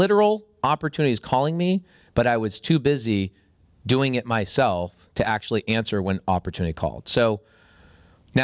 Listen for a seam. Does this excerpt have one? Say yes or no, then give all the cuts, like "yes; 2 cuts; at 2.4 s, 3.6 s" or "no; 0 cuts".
no; 0 cuts